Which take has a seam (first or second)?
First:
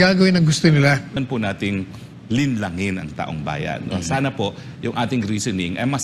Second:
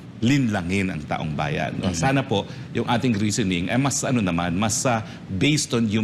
first